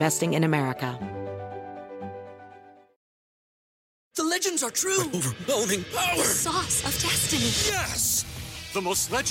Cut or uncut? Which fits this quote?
cut